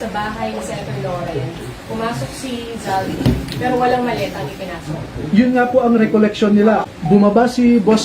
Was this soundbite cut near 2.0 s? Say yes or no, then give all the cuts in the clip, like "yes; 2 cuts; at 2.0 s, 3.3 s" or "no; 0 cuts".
no; 1 cut; at 6.9 s